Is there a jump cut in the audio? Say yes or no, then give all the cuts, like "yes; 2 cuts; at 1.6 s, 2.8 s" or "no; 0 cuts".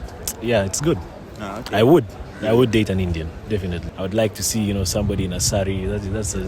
yes; 1 cut; at 3.8 s